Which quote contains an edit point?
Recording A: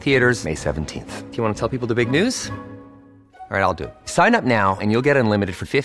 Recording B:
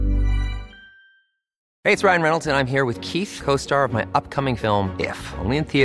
B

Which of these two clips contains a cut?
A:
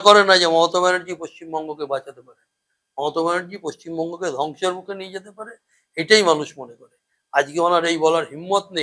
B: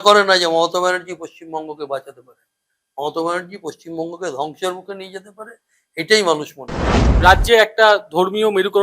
B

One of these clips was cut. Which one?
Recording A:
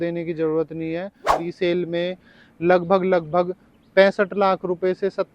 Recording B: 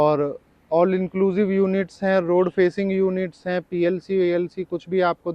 A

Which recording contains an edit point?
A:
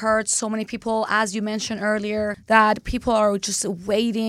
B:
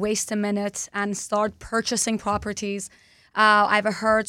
A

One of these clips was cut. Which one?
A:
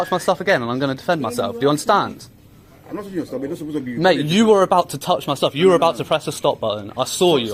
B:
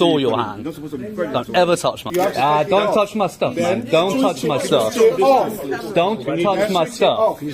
B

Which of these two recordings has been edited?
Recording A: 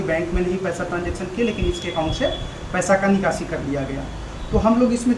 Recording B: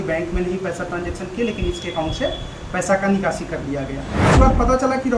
B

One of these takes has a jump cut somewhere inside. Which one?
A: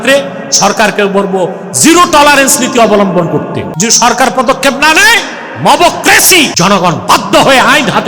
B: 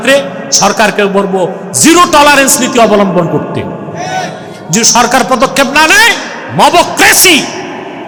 A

